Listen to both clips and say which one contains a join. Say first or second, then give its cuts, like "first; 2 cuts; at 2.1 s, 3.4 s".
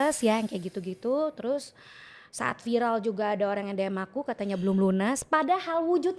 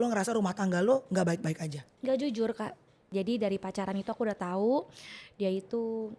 second; 1 cut; at 3.1 s